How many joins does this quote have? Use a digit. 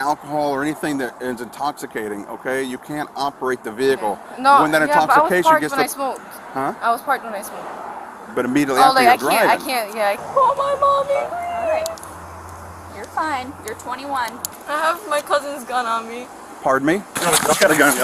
3